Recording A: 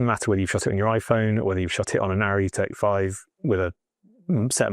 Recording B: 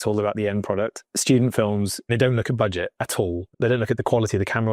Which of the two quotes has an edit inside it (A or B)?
B